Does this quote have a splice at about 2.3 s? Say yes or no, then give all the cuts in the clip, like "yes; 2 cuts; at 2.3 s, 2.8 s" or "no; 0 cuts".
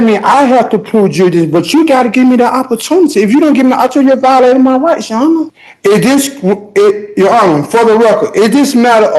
no; 1 cut; at 5.5 s